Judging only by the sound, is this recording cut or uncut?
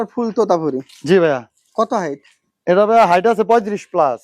uncut